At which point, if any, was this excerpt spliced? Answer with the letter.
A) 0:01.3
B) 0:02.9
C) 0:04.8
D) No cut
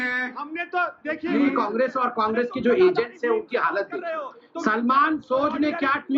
A